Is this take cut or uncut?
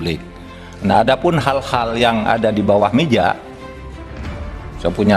cut